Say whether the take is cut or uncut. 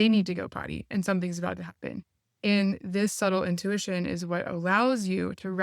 uncut